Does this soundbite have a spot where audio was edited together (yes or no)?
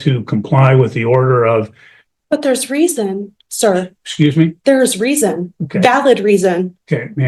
no